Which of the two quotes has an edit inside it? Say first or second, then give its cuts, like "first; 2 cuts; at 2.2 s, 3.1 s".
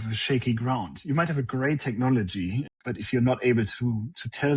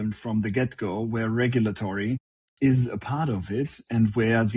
first; 1 cut; at 2.6 s